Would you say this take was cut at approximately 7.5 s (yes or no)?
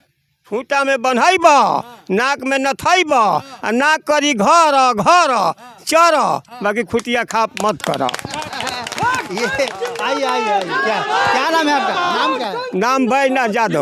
no